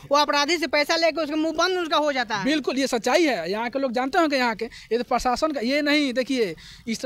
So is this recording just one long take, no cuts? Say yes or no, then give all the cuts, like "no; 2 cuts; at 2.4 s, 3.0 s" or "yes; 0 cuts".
yes; 0 cuts